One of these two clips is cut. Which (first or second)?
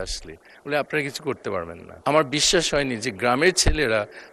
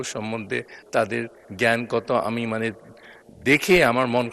first